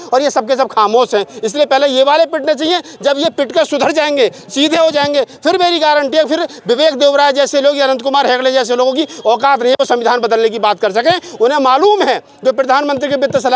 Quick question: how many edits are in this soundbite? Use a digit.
0